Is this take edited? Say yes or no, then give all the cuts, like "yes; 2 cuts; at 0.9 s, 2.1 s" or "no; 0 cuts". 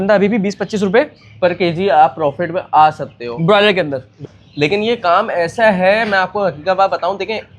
yes; 1 cut; at 4.4 s